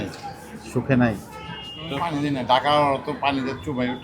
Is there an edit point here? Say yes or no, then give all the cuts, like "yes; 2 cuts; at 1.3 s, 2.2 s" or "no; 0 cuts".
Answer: yes; 1 cut; at 2.1 s